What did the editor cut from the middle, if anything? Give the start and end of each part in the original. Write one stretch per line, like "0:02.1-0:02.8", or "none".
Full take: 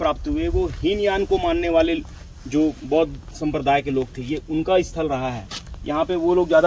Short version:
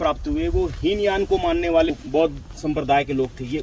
0:01.9-0:02.7